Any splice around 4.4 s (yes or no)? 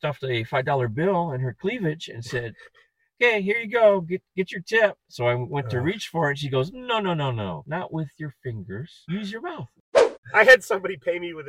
no